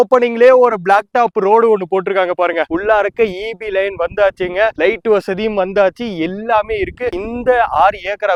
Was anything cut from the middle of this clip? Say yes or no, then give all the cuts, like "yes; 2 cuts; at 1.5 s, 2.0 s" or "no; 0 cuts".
no; 0 cuts